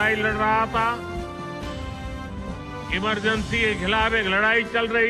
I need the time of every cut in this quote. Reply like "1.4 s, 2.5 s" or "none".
none